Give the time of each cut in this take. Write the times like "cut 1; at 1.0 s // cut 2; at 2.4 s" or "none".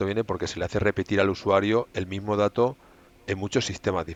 none